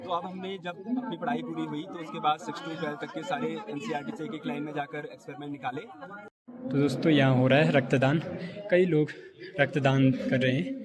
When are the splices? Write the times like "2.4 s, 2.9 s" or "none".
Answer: 6.2 s